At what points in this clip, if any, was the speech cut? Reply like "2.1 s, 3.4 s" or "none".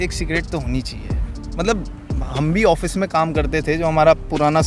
none